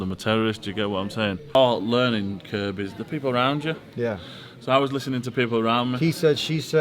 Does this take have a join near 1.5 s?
yes; 1 cut; at 1.5 s

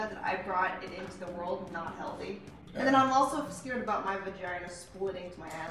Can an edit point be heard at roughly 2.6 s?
yes; 1 cut; at 2.6 s

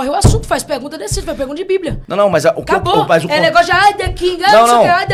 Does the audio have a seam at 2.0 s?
no; 0 cuts

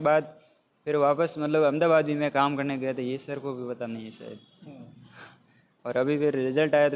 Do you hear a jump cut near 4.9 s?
no; 0 cuts

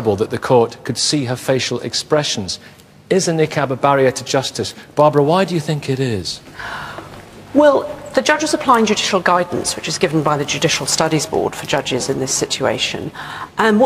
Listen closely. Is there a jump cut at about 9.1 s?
yes; 1 cut; at 9.1 s

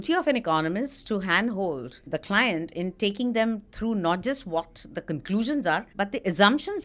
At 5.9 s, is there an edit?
yes; 2 cuts; at 2.1 s, 5.9 s

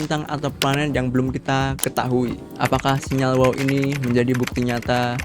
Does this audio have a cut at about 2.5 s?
yes; 1 cut; at 2.5 s

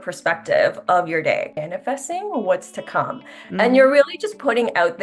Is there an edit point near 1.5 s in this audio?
yes; 1 cut; at 1.5 s

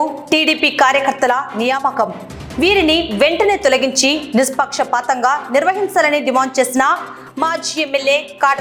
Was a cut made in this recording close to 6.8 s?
no; 0 cuts

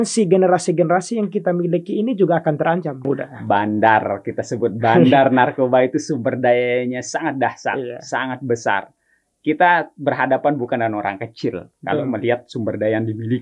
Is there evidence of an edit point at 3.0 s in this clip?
yes; 1 cut; at 3.0 s

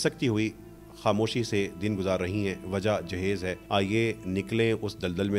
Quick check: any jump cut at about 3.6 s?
yes; 1 cut; at 3.6 s

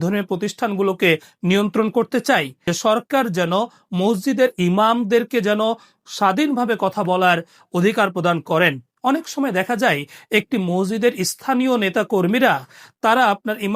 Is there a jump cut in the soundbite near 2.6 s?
yes; 1 cut; at 2.6 s

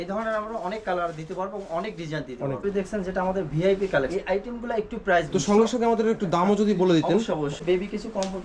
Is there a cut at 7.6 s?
yes; 4 cuts; at 2.6 s, 4.1 s, 5.3 s, 7.6 s

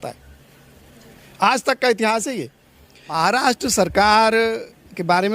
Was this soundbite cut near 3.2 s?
yes; 1 cut; at 3.2 s

